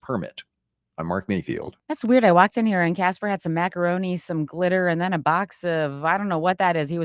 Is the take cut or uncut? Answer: cut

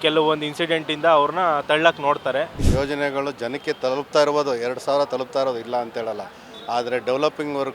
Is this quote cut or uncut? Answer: cut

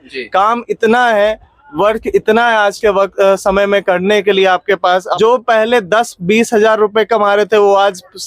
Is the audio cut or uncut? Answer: cut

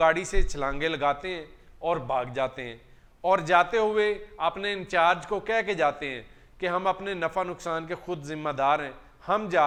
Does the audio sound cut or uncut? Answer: uncut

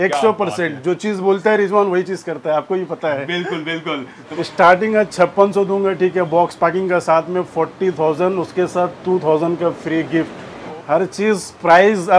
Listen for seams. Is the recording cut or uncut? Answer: cut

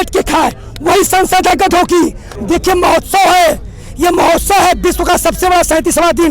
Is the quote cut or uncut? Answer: cut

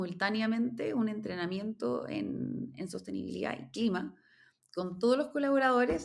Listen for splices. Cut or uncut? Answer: uncut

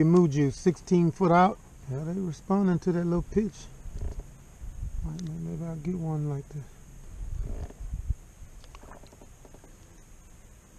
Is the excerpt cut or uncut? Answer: cut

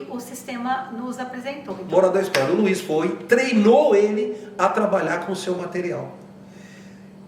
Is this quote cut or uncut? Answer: uncut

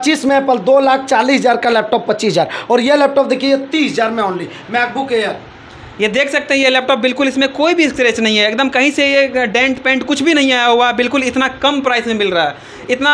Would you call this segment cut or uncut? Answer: uncut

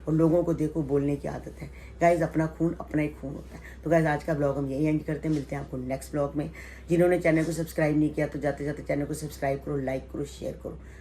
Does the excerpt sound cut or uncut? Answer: uncut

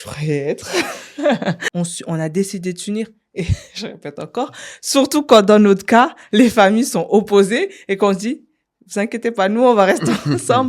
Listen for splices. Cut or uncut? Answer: cut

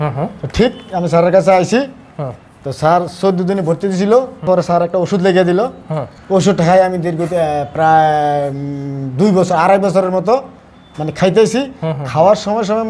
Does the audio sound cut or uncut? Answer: uncut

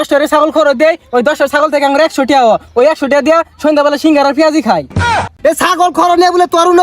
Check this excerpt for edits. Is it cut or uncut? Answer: cut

